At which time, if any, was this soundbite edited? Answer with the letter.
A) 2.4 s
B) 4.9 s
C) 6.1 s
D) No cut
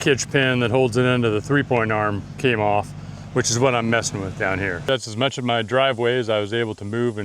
B